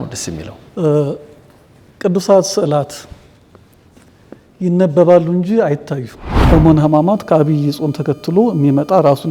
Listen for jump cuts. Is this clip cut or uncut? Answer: cut